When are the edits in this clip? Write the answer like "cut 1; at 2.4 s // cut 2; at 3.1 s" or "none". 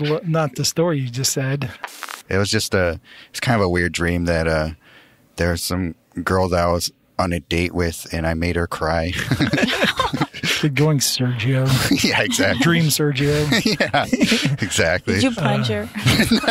cut 1; at 1.9 s